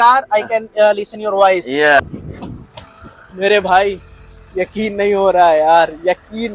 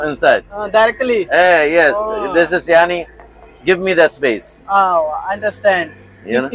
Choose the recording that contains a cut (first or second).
first